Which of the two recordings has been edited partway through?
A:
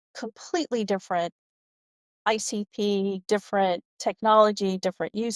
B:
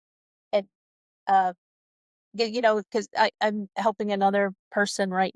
A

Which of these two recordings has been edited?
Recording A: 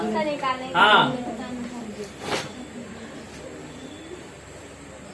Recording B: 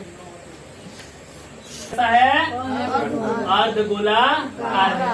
B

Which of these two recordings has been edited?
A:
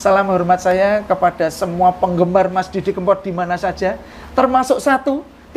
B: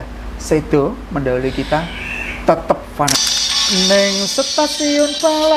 B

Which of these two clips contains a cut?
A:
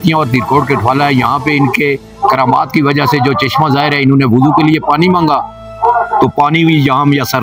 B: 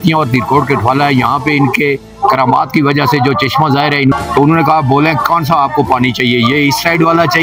B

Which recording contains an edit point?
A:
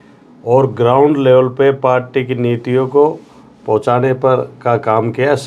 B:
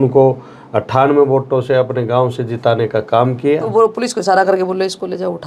B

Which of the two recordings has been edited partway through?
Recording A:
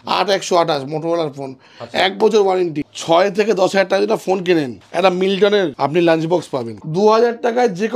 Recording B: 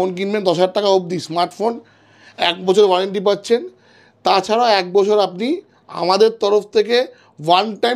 A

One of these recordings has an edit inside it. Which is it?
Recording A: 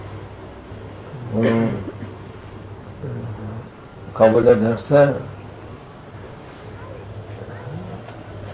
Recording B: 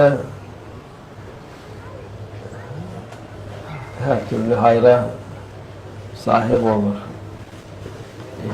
B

